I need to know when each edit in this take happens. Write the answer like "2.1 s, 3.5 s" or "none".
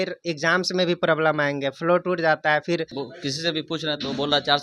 3.0 s